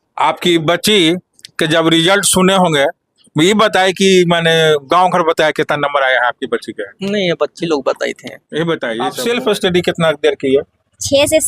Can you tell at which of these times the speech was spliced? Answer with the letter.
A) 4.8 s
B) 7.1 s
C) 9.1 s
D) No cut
C